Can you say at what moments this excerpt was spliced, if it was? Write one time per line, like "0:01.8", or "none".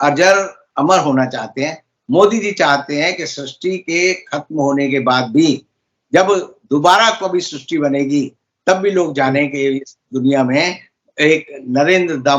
none